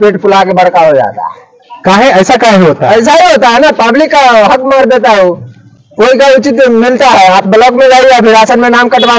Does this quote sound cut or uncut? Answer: uncut